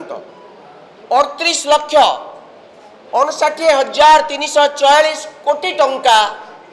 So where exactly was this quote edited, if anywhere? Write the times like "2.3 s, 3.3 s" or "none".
none